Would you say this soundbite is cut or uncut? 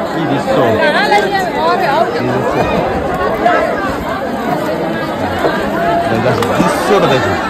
uncut